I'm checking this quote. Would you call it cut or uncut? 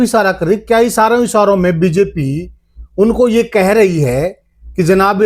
uncut